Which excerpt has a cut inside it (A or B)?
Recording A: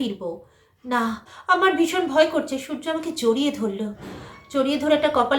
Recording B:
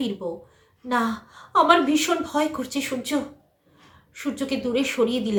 A